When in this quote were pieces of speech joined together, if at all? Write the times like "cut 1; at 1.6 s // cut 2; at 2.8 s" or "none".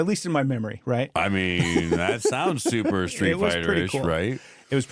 none

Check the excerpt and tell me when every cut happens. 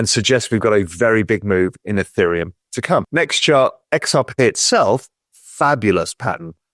cut 1; at 3.1 s

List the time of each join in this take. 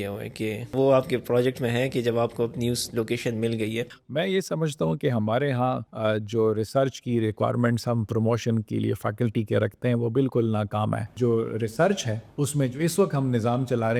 cut 1; at 0.7 s // cut 2; at 4.0 s // cut 3; at 5.9 s // cut 4; at 11.1 s // cut 5; at 12.2 s

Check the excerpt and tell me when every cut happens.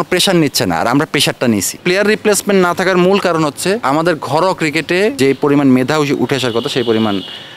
cut 1; at 1.7 s // cut 2; at 3.8 s // cut 3; at 5.2 s

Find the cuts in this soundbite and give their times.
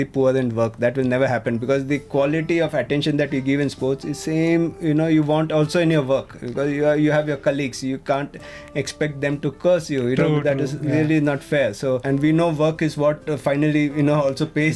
cut 1; at 12.0 s

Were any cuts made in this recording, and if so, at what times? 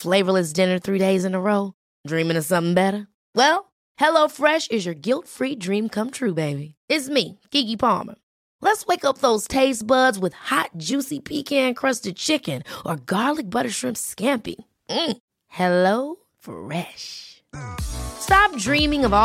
none

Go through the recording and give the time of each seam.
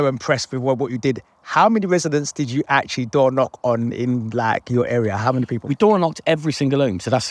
none

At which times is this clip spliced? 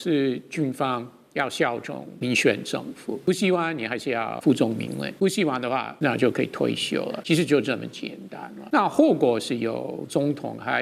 cut 1; at 2.1 s // cut 2; at 3.3 s // cut 3; at 4.4 s // cut 4; at 5.1 s // cut 5; at 5.9 s // cut 6; at 7.2 s // cut 7; at 8.6 s

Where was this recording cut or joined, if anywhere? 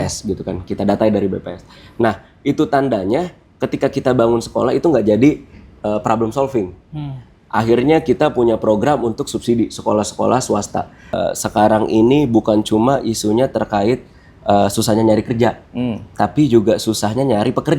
cut 1; at 11.1 s

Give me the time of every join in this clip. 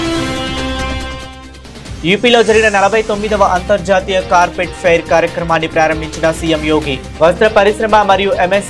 none

